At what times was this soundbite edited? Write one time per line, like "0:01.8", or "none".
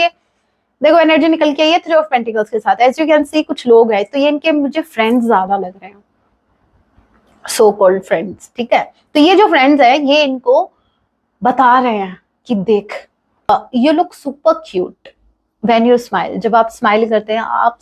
0:13.5